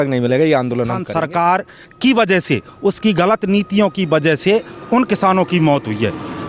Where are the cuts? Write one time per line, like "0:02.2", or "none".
0:01.0

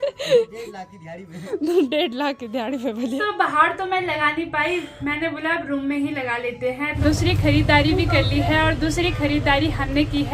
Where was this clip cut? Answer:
0:03.2
0:06.9

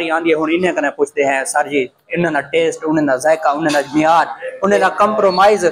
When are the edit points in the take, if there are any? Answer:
none

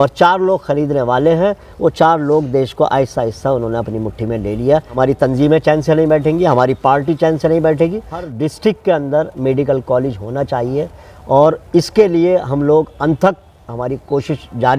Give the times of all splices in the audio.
0:04.9
0:08.3

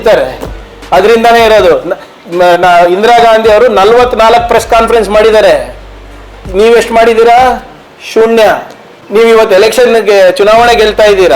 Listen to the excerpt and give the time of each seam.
0:09.0

